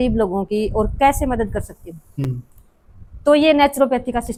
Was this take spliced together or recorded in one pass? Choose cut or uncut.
uncut